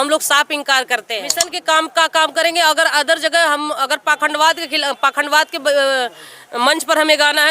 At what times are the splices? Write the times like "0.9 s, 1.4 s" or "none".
1.5 s